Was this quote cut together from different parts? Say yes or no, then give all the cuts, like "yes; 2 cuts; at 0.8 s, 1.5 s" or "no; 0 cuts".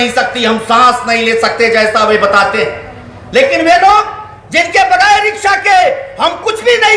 no; 0 cuts